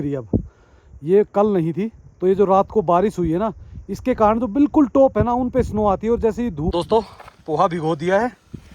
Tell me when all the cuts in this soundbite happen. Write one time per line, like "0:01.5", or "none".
0:06.7